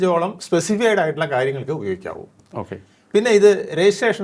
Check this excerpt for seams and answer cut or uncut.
uncut